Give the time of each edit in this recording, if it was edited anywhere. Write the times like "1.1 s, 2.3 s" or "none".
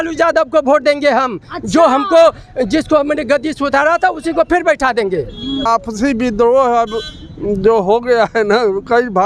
5.7 s